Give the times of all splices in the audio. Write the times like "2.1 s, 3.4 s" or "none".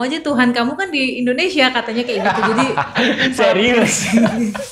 none